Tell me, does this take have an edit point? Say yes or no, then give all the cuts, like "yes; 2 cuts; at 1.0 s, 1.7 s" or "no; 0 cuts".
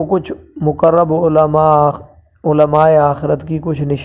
no; 0 cuts